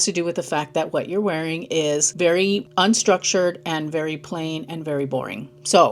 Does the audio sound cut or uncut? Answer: cut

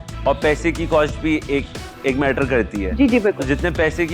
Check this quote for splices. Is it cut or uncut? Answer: uncut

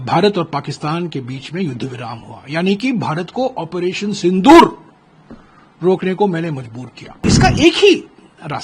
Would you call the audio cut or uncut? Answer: cut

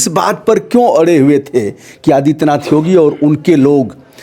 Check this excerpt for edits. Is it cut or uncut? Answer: uncut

